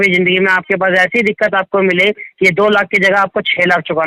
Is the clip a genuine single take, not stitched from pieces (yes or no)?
yes